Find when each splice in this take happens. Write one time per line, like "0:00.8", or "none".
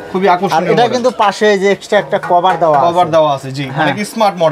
none